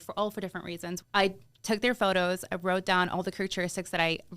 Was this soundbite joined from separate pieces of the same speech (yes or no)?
yes